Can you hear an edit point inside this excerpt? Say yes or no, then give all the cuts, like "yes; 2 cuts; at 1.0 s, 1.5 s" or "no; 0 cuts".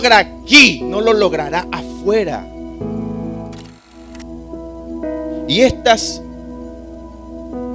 yes; 1 cut; at 3.6 s